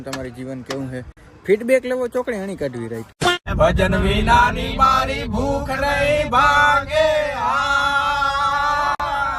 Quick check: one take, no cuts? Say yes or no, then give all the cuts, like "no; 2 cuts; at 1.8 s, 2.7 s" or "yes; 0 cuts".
yes; 0 cuts